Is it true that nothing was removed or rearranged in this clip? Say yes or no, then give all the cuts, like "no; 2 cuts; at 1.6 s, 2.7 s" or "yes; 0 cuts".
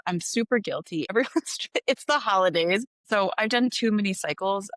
no; 2 cuts; at 1.1 s, 2.9 s